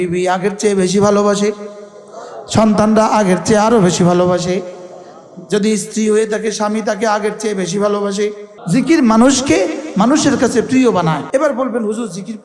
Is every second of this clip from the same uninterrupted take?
no; 2 cuts; at 8.5 s, 11.2 s

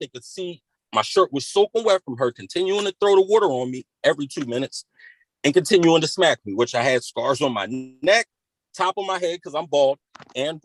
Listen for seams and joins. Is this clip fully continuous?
yes; 0 cuts

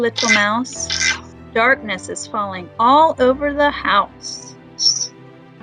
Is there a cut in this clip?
no; 0 cuts

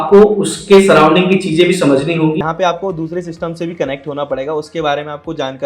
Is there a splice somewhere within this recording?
yes; 1 cut; at 2.4 s

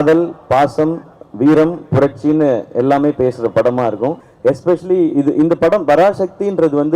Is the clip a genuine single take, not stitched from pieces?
no; 1 cut; at 4.3 s

